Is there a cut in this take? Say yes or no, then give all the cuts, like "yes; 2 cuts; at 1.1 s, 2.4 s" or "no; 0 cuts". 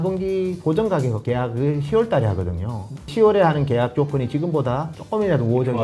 yes; 3 cuts; at 1.2 s, 3.1 s, 4.9 s